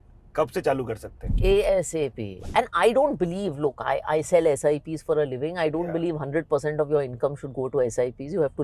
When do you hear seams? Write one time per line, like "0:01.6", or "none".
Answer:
0:01.2
0:02.4